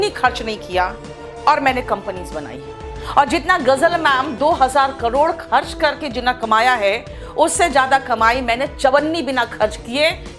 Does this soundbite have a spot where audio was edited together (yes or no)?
no